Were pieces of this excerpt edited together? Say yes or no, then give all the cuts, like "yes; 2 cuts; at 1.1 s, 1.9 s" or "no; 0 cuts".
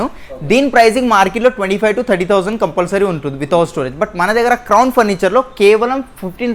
no; 0 cuts